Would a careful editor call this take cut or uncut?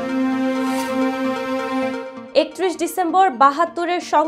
cut